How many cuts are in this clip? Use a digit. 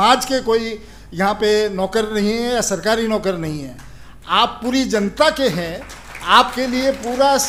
0